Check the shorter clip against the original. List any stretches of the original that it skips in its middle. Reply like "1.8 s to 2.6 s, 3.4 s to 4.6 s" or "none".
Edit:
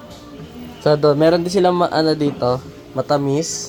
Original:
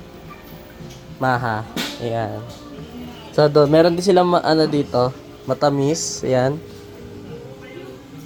none